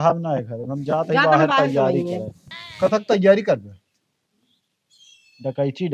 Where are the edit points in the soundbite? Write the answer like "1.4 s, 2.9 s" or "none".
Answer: none